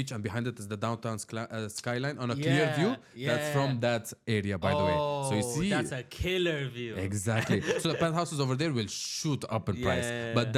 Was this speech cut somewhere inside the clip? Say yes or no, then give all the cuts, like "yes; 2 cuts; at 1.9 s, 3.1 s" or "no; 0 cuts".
no; 0 cuts